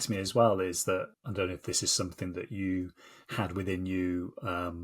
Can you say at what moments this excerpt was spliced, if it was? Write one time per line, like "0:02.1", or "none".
0:01.2